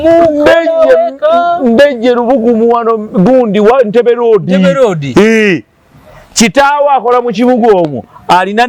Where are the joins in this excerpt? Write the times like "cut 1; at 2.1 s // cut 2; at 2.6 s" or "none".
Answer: none